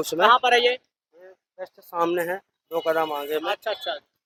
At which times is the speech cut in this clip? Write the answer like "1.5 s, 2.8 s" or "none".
none